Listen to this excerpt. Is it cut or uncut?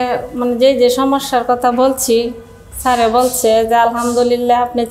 uncut